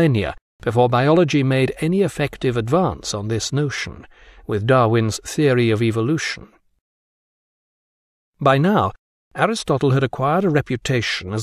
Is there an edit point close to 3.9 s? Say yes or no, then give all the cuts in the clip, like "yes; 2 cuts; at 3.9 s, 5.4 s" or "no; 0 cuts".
no; 0 cuts